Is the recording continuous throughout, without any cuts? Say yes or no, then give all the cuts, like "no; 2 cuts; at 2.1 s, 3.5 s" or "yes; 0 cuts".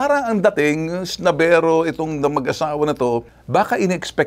no; 1 cut; at 3.3 s